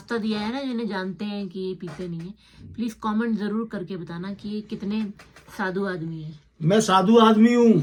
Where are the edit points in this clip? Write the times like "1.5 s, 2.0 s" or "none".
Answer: none